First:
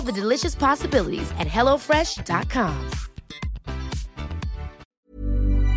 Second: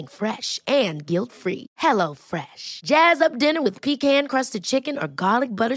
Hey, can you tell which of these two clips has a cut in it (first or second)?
first